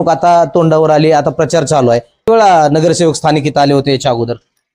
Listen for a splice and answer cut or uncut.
uncut